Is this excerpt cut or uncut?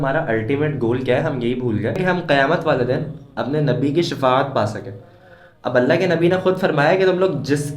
cut